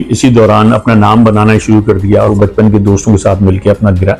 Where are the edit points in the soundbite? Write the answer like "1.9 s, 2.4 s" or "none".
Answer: 2.3 s